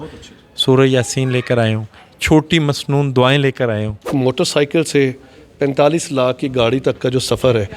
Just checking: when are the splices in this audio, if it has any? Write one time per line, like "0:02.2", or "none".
0:04.1